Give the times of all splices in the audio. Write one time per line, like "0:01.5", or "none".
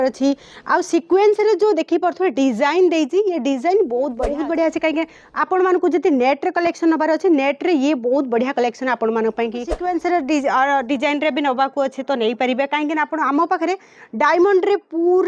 0:04.2
0:09.8